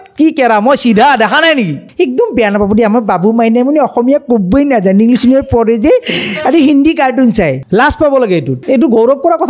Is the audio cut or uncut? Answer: cut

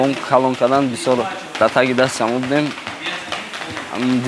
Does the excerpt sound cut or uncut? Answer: uncut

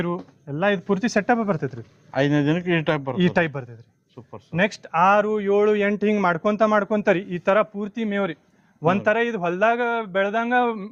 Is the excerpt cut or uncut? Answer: uncut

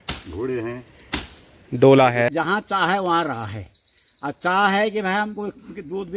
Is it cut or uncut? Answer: cut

